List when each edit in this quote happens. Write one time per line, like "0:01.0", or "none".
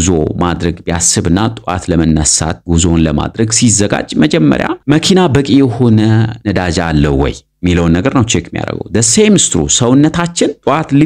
none

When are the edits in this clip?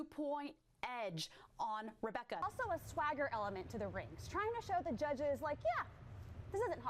0:02.4

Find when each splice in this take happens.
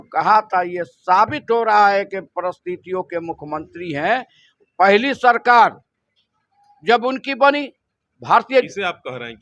none

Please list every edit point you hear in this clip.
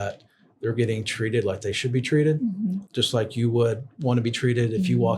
0:02.8

